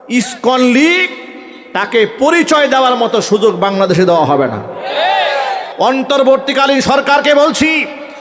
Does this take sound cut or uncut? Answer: cut